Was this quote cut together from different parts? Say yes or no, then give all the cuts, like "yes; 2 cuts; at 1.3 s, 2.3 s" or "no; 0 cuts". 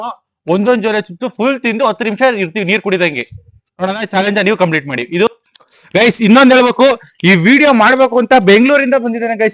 yes; 1 cut; at 5.3 s